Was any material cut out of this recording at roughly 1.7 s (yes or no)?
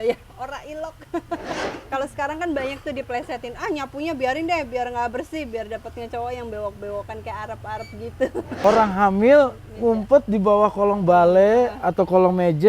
yes